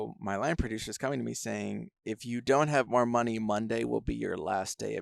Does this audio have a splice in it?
yes; 1 cut; at 2.0 s

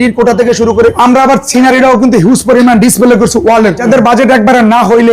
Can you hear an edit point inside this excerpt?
yes; 2 cuts; at 1.0 s, 3.8 s

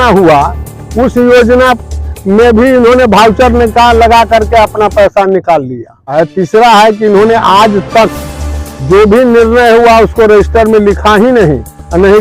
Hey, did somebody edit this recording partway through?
yes; 1 cut; at 6.1 s

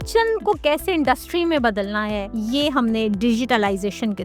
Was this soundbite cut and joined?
yes; 1 cut; at 2.3 s

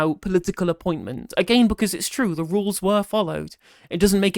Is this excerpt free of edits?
no; 1 cut; at 1.2 s

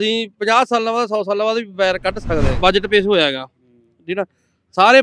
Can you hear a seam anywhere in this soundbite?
yes; 1 cut; at 2.6 s

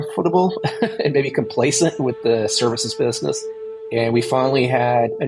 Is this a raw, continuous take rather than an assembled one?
no; 1 cut; at 3.8 s

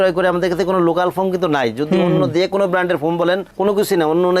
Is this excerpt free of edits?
yes; 0 cuts

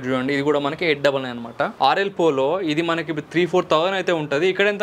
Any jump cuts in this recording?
yes; 1 cut; at 1.7 s

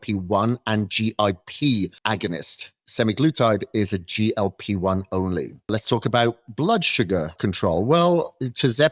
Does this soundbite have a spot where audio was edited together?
yes; 3 cuts; at 2.0 s, 5.7 s, 7.4 s

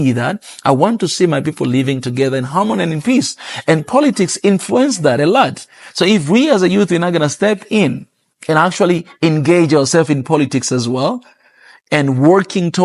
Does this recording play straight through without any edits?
yes; 0 cuts

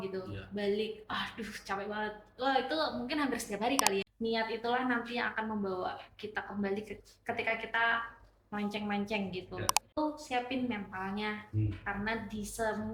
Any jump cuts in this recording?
yes; 2 cuts; at 4.0 s, 10.0 s

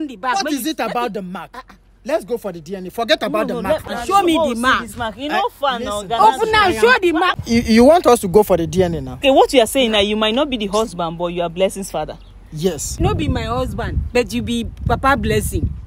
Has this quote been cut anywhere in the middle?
yes; 4 cuts; at 3.8 s, 7.3 s, 9.2 s, 12.9 s

